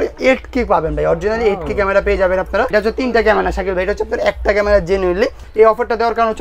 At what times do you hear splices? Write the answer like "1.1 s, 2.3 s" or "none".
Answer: 2.7 s, 5.4 s